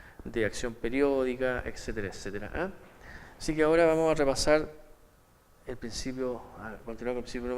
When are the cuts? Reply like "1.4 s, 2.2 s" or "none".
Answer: 1.7 s

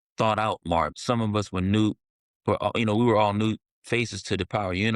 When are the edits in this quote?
1.0 s

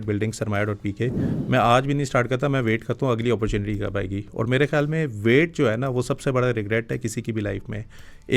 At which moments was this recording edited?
1.3 s

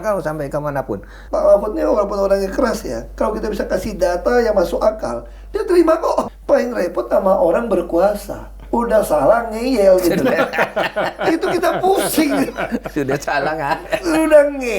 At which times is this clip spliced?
1.2 s, 6.3 s

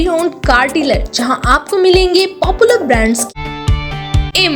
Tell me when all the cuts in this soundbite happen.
3.3 s

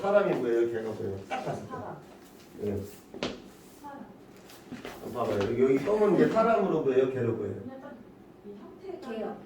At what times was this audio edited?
none

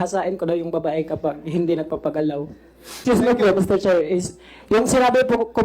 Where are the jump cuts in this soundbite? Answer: 3.0 s

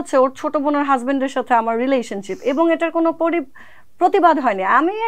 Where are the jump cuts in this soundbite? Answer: none

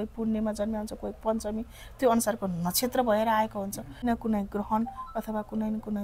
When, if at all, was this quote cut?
4.0 s

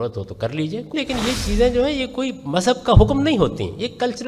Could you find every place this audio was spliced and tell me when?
0.9 s

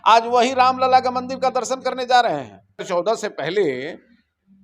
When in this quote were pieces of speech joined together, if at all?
2.9 s

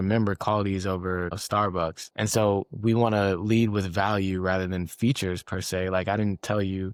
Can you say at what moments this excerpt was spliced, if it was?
none

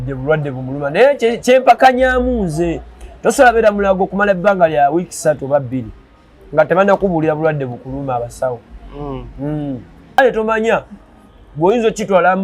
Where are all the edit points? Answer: 10.2 s

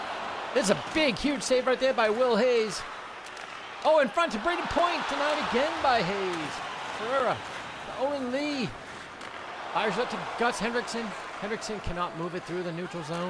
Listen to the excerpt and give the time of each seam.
none

